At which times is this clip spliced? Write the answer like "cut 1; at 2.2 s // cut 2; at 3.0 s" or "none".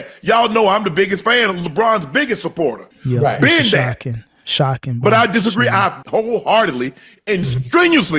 cut 1; at 2.9 s // cut 2; at 6.0 s